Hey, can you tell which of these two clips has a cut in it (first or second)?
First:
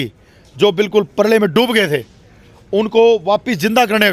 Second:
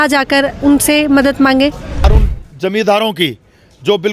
second